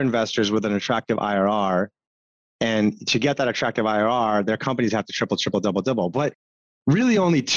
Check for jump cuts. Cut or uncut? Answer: uncut